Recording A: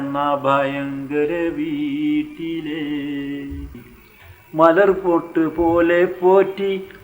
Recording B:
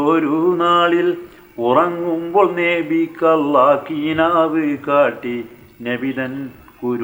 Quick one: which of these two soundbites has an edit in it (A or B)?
A